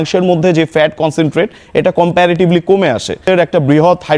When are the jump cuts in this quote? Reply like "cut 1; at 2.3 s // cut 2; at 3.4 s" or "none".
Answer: cut 1; at 3.3 s